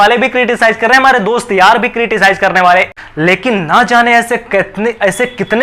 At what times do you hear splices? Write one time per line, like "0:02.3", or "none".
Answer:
0:03.0